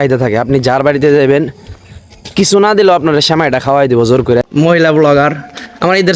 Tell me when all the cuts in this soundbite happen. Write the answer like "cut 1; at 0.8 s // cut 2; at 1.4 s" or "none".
cut 1; at 4.5 s